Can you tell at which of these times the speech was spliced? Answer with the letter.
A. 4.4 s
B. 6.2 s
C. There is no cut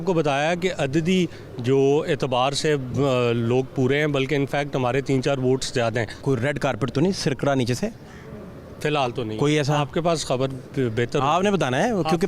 B